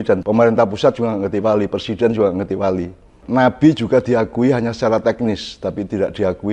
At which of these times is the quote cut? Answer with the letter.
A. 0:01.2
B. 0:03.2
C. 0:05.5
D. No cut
B